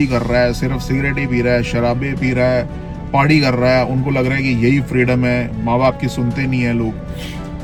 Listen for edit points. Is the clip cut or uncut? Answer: uncut